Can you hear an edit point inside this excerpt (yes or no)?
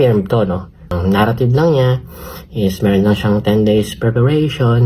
yes